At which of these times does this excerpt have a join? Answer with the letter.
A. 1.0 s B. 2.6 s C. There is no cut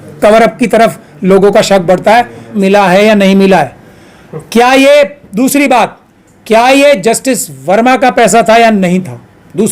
B